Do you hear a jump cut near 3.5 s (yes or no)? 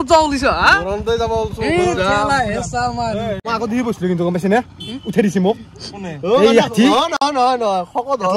yes